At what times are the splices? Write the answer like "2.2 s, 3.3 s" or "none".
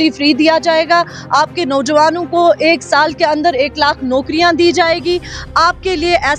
none